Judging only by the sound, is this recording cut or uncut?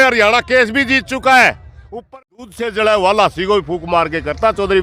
cut